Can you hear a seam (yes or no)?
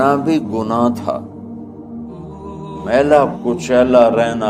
yes